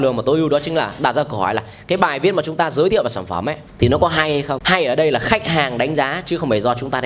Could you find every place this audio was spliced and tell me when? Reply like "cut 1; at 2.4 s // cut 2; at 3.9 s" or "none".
cut 1; at 3.6 s // cut 2; at 4.6 s